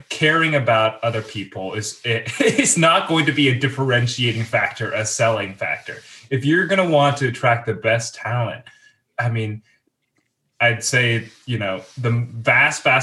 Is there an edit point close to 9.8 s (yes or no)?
yes